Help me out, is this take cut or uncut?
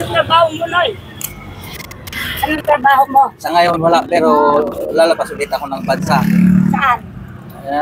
uncut